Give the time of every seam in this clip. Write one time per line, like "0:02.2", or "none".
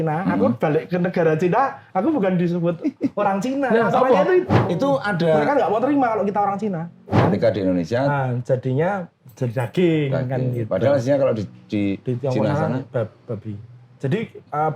0:04.5
0:07.2